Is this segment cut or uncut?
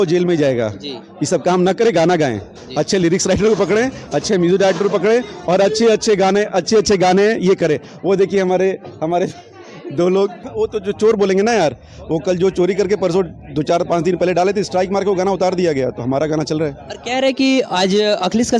cut